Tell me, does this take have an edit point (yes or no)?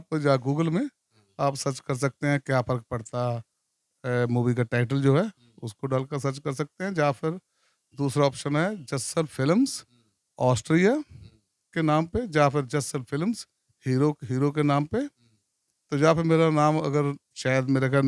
no